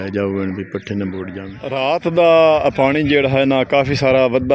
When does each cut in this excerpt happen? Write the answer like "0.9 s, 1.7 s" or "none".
1.5 s